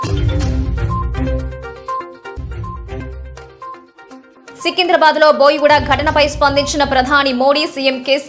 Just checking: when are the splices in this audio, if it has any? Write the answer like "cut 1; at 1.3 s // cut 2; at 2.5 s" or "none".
cut 1; at 2.2 s